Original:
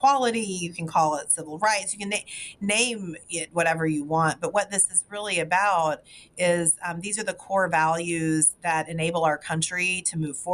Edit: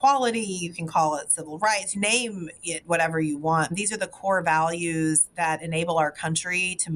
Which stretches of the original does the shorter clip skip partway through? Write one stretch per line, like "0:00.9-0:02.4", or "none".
0:01.9-0:02.5
0:04.4-0:07.0